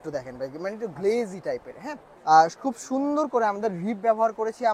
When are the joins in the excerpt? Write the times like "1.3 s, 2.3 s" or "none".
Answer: 2.0 s